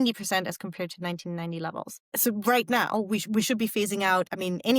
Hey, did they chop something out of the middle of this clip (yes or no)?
yes